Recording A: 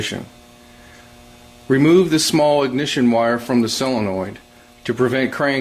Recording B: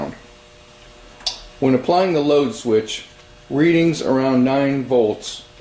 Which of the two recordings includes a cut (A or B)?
B